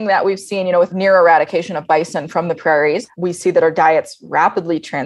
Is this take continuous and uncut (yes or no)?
no